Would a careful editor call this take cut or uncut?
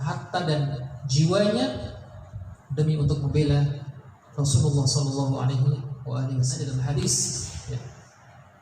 cut